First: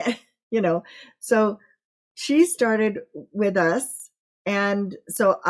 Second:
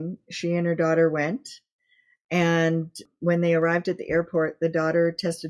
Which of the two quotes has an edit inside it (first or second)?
second